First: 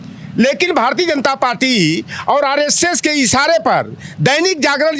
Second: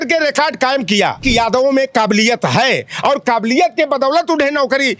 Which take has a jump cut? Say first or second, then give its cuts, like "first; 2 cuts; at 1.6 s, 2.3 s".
second; 1 cut; at 1.2 s